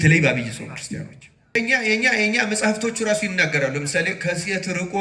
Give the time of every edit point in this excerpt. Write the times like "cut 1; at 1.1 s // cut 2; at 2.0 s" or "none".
cut 1; at 1.5 s